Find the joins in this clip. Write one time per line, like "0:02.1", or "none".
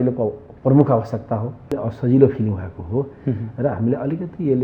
0:01.7